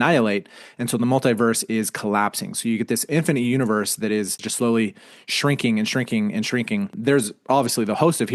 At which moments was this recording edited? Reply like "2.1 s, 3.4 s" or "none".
4.4 s, 6.9 s